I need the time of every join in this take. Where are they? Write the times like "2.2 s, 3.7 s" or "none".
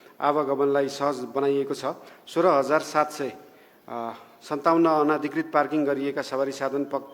none

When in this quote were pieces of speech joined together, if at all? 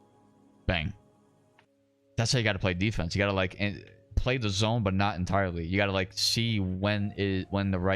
1.6 s

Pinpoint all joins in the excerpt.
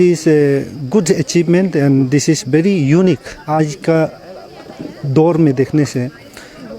3.3 s

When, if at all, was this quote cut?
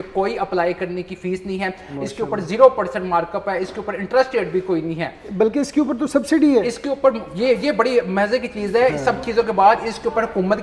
none

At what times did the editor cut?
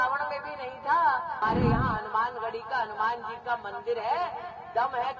1.4 s

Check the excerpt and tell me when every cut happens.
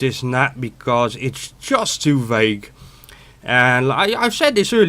1.2 s

